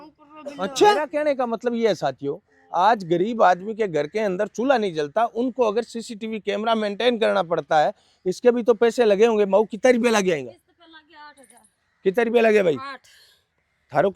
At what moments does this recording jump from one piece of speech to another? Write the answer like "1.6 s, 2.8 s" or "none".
1.1 s